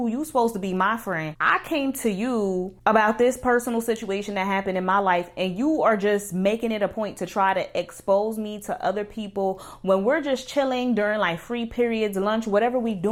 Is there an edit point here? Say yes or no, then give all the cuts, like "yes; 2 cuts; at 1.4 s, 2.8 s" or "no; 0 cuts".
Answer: no; 0 cuts